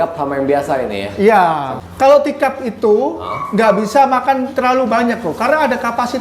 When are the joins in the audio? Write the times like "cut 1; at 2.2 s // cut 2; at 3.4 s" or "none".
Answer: cut 1; at 1.8 s